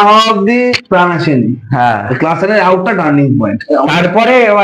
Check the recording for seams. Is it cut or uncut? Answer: uncut